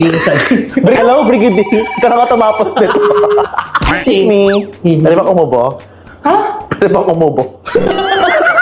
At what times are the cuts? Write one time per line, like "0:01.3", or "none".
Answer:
0:01.0
0:03.9